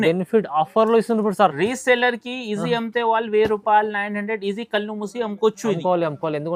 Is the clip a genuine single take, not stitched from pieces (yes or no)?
yes